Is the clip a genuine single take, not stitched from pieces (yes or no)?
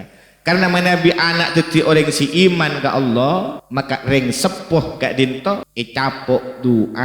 no